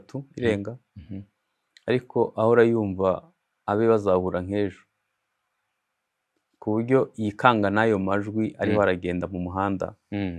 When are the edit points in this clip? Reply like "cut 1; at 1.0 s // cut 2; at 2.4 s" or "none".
none